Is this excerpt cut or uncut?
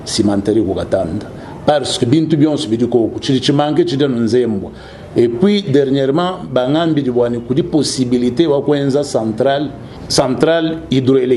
uncut